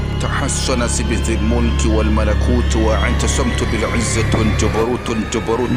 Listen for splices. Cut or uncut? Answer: uncut